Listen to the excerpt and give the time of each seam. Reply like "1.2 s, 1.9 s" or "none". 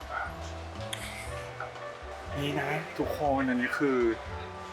none